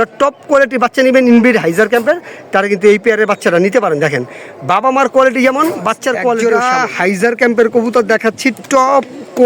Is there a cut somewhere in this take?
yes; 1 cut; at 6.4 s

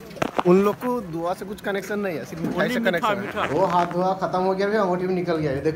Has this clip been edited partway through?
yes; 1 cut; at 3.5 s

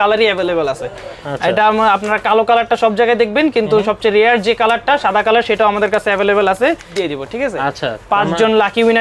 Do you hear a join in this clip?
yes; 1 cut; at 6.9 s

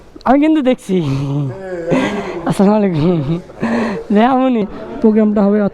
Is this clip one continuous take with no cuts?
no; 1 cut; at 4.6 s

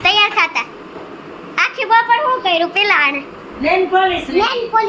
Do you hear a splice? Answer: no; 0 cuts

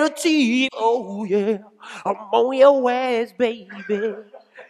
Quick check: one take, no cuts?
yes; 0 cuts

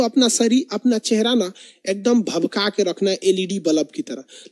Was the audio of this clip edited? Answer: no; 0 cuts

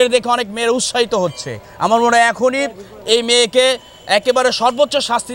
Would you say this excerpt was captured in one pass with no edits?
yes; 0 cuts

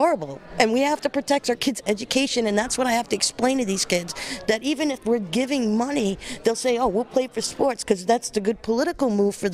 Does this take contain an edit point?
no; 0 cuts

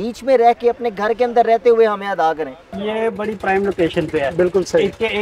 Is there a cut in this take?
yes; 1 cut; at 2.8 s

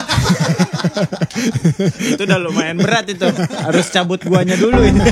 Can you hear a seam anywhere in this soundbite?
no; 0 cuts

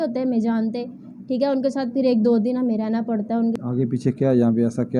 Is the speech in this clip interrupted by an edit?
yes; 1 cut; at 3.6 s

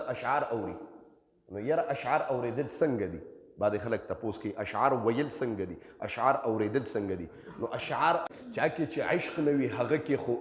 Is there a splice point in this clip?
yes; 1 cut; at 8.2 s

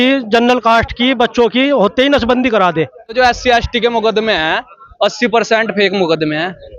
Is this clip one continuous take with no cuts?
no; 1 cut; at 3.1 s

